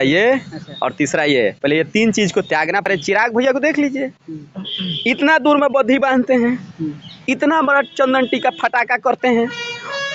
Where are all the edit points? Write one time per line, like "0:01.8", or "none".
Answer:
0:02.9